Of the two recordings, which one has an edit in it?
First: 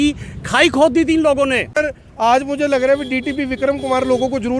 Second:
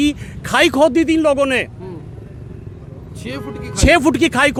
first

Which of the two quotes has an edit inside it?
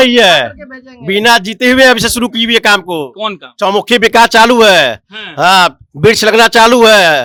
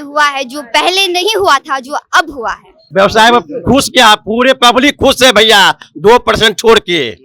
second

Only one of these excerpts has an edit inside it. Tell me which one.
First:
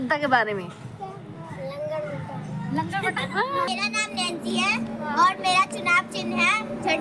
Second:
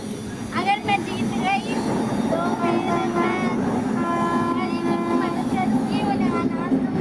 first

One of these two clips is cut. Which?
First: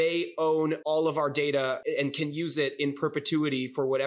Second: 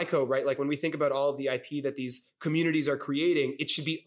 first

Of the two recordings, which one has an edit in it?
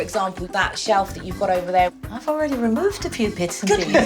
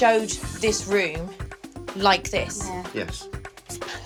first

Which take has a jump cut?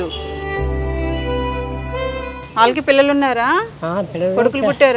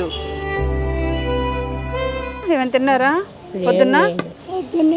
second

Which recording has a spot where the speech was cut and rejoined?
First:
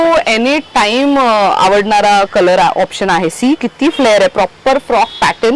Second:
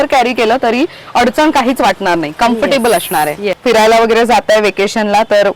second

